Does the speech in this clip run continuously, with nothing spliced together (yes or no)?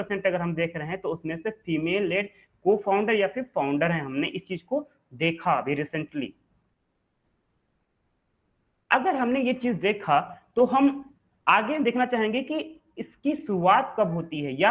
yes